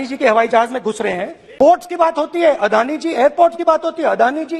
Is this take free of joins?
no; 1 cut; at 1.4 s

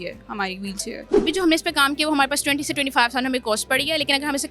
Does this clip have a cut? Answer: yes; 1 cut; at 1.0 s

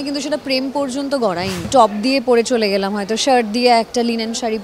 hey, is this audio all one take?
no; 1 cut; at 1.7 s

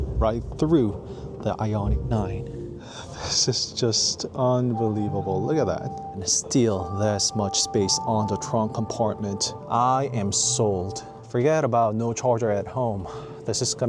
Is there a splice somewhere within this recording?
yes; 3 cuts; at 2.8 s, 6.3 s, 9.6 s

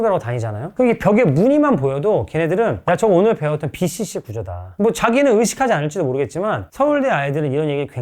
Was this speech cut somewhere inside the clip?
yes; 1 cut; at 4.6 s

